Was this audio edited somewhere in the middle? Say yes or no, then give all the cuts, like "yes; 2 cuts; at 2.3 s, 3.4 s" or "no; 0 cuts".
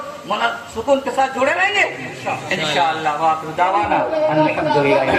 no; 0 cuts